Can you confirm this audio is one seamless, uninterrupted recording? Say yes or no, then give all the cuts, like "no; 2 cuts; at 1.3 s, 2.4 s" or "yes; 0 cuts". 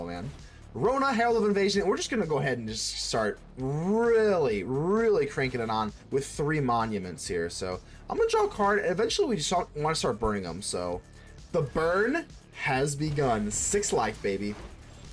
yes; 0 cuts